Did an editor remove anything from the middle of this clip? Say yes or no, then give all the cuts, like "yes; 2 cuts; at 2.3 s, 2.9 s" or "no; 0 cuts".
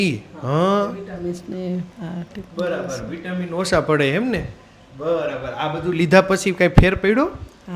no; 0 cuts